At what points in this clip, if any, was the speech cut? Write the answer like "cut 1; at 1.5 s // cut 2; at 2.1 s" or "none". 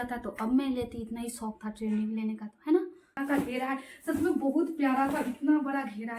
cut 1; at 3.2 s